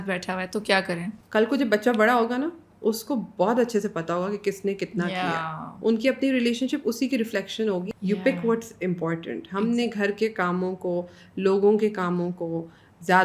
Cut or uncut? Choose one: cut